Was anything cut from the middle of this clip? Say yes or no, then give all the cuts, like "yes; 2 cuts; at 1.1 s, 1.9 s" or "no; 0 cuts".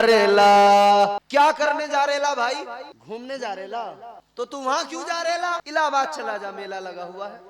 yes; 4 cuts; at 1.2 s, 2.9 s, 4.1 s, 5.6 s